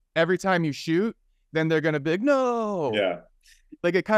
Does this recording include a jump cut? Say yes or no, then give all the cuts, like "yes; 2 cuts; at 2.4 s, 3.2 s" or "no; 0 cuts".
no; 0 cuts